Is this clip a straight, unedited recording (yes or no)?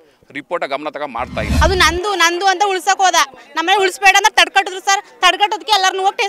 no